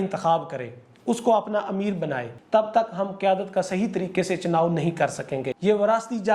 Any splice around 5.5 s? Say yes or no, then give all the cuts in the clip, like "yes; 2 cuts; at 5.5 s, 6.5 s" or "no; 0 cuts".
yes; 2 cuts; at 2.3 s, 5.5 s